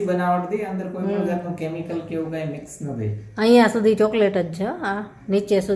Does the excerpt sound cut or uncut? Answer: uncut